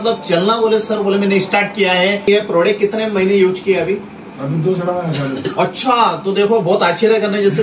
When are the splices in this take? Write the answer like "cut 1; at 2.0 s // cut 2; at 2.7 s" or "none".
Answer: cut 1; at 2.2 s